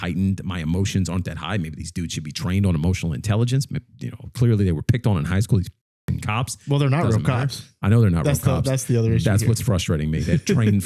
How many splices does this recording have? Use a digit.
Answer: 0